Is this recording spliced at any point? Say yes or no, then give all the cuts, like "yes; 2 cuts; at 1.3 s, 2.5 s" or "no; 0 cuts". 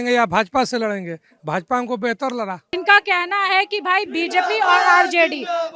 yes; 1 cut; at 2.7 s